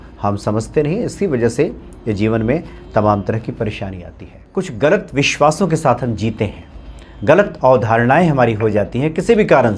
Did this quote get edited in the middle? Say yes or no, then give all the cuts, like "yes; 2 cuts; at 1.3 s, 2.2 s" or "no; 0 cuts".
yes; 1 cut; at 4.4 s